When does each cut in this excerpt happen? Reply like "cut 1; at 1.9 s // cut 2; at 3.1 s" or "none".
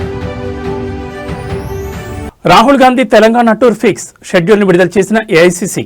cut 1; at 2.2 s